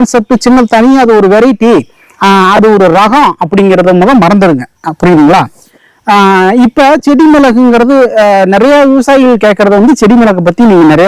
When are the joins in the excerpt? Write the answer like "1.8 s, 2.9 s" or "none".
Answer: none